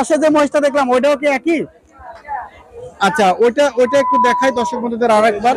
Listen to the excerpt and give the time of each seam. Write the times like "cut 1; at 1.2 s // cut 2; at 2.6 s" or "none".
none

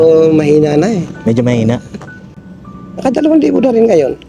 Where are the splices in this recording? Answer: none

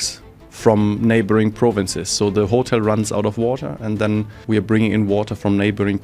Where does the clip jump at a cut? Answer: cut 1; at 4.4 s

